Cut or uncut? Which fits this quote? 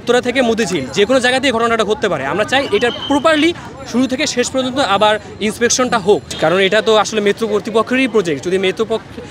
uncut